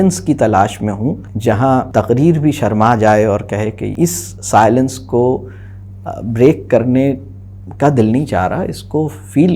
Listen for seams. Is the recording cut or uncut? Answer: cut